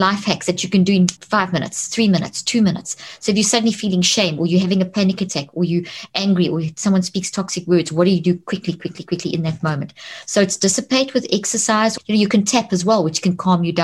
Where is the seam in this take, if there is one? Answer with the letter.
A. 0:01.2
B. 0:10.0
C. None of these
A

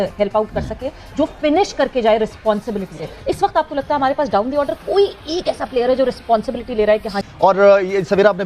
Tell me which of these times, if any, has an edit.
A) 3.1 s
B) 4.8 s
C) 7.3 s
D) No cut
C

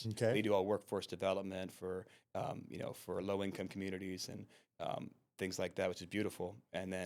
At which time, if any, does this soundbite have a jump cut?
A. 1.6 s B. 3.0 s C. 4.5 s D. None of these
D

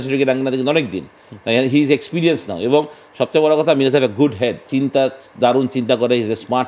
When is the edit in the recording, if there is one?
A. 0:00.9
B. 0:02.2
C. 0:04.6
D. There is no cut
C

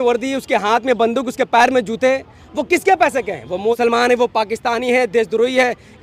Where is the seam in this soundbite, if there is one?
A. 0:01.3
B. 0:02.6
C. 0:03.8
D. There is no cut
C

